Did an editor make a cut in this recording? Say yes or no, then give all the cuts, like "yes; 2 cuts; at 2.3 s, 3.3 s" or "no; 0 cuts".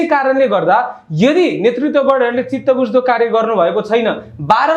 no; 0 cuts